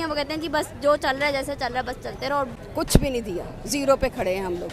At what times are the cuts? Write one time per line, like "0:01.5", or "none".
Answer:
0:02.6